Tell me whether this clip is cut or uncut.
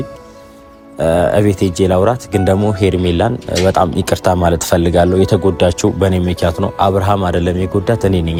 uncut